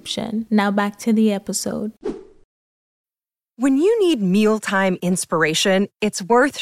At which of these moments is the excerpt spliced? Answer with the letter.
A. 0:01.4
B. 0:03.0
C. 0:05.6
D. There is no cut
B